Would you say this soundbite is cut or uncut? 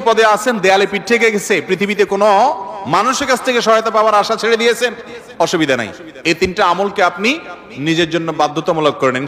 uncut